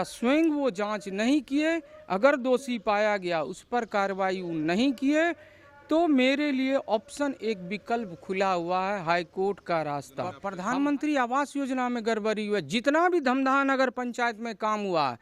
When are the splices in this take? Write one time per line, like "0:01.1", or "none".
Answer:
0:10.5